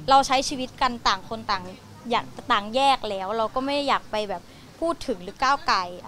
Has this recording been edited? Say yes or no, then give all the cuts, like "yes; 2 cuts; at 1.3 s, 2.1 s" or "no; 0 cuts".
no; 0 cuts